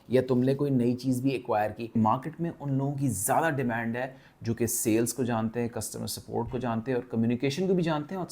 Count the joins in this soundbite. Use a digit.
1